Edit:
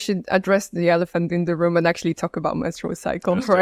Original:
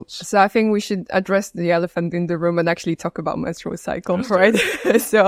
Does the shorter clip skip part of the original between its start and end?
no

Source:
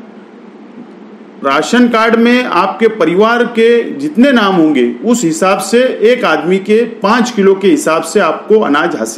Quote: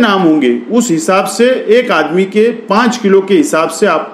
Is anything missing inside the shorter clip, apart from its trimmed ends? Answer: no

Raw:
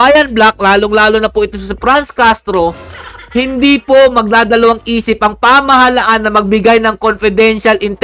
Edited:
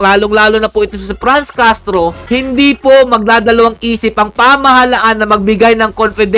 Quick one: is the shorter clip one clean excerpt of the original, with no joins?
no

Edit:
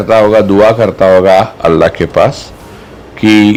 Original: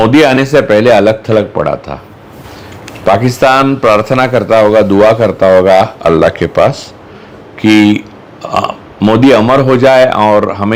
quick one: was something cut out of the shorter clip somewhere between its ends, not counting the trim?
no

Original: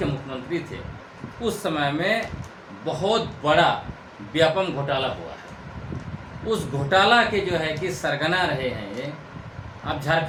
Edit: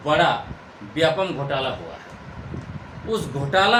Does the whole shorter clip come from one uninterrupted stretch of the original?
yes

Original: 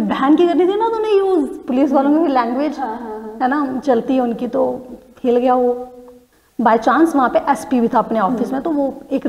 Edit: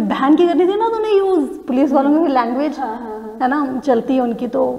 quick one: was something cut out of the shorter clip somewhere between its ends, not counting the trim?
no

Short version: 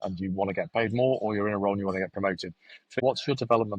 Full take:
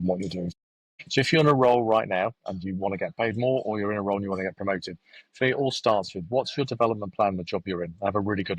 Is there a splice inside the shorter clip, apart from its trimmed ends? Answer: yes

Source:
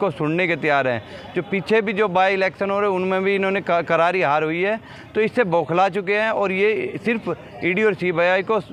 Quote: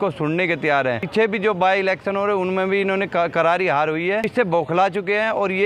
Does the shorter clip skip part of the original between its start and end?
yes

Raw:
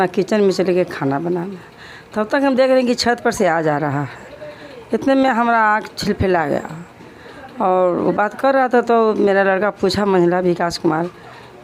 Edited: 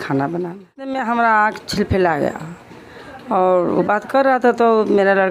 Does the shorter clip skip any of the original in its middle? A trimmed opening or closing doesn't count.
yes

